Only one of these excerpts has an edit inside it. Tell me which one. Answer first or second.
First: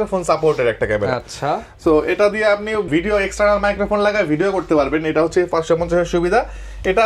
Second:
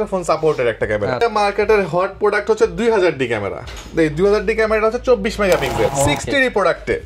second